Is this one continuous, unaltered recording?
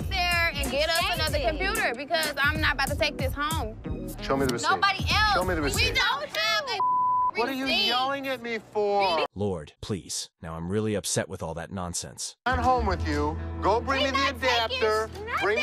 yes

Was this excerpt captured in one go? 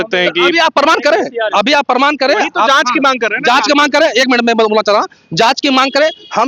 yes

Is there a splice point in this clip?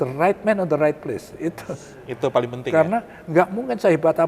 no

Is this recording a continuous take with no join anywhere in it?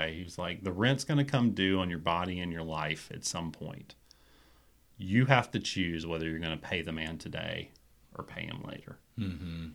yes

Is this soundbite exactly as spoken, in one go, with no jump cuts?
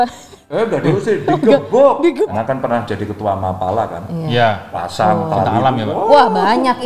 no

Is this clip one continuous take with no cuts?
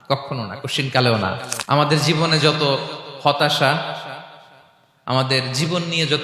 no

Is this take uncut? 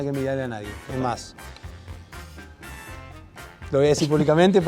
yes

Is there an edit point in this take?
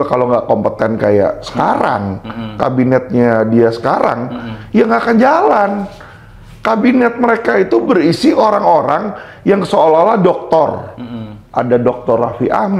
no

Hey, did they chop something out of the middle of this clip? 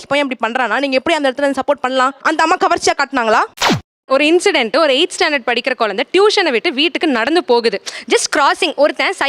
yes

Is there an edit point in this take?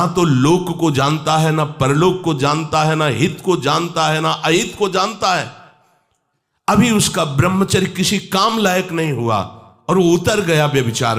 no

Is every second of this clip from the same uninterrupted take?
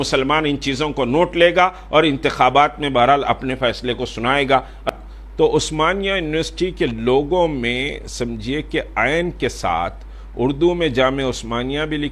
no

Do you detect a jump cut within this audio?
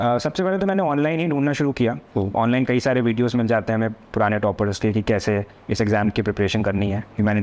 no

